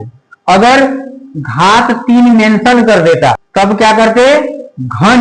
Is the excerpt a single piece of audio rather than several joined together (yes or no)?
no